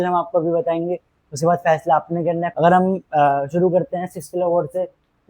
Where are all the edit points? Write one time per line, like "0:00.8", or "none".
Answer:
0:02.5